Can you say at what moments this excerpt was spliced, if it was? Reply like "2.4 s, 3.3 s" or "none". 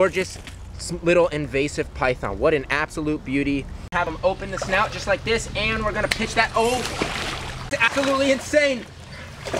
4.1 s, 7.9 s